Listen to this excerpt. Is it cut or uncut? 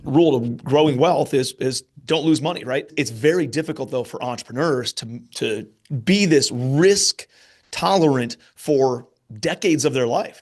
cut